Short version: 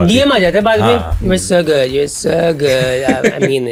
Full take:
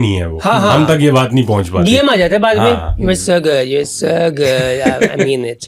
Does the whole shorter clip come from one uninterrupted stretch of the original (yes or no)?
yes